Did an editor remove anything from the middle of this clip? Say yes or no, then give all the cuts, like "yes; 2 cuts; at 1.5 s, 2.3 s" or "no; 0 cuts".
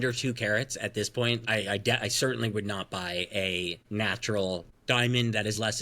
yes; 3 cuts; at 1.4 s, 3.8 s, 4.7 s